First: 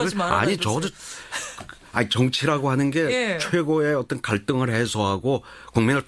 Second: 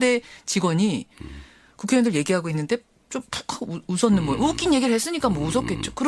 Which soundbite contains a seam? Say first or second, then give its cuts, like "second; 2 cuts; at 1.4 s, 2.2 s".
second; 1 cut; at 3.3 s